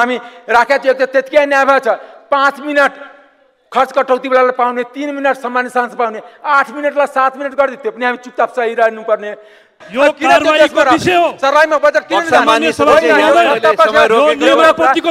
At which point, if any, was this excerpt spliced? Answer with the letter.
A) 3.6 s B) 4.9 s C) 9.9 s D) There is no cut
C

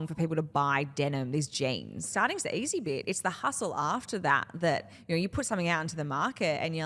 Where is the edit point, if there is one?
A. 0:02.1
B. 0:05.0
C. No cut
A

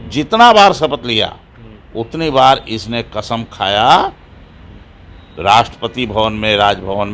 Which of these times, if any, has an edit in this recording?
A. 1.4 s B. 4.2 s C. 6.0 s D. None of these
D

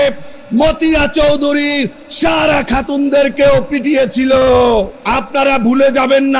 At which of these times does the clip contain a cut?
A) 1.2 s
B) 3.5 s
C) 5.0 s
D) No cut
C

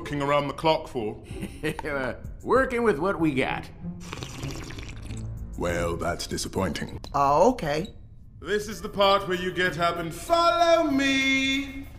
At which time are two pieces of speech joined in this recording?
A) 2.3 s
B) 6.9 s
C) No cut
B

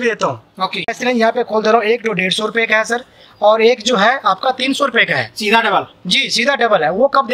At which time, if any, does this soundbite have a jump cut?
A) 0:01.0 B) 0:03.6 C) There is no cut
A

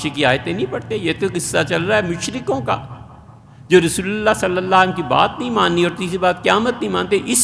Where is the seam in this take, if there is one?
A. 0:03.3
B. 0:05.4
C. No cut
C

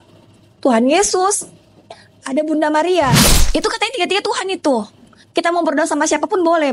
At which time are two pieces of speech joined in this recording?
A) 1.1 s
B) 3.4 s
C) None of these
B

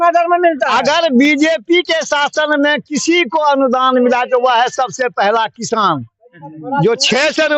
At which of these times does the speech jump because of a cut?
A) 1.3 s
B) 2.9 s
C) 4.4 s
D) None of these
D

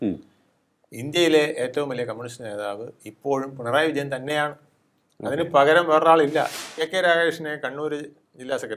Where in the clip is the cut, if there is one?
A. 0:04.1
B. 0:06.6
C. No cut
B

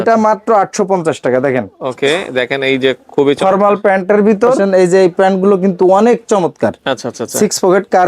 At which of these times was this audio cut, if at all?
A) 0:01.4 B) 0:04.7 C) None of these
B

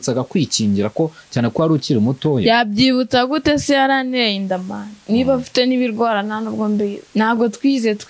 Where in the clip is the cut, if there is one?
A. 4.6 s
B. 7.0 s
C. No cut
B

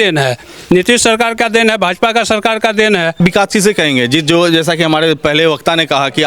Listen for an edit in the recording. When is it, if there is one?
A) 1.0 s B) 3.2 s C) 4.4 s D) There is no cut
B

